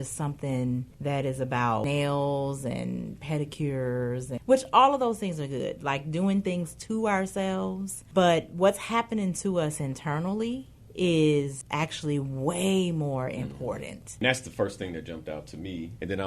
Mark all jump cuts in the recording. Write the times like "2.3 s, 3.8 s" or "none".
0.9 s, 1.8 s, 4.3 s, 7.9 s, 10.8 s, 11.6 s, 14.1 s